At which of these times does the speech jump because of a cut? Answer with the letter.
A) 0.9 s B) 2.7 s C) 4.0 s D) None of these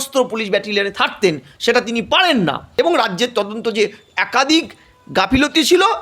B